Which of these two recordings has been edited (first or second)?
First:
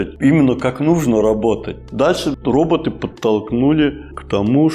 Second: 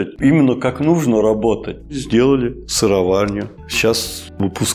second